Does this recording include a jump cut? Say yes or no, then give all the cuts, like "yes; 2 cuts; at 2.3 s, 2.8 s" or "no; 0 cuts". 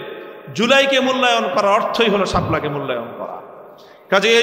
no; 0 cuts